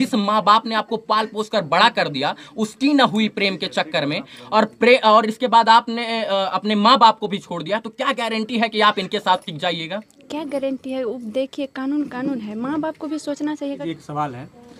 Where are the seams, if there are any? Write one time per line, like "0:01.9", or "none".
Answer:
0:13.8